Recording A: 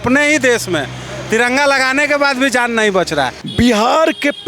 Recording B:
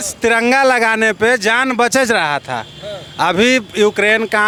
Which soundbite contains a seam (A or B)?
A